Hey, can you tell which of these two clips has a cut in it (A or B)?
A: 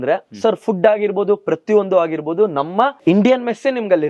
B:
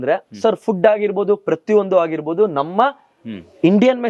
A